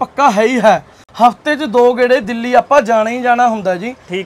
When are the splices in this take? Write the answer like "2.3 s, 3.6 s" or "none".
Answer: none